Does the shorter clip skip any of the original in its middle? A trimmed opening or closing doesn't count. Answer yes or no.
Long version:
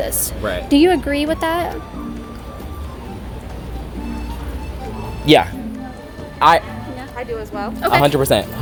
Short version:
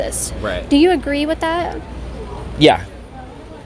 yes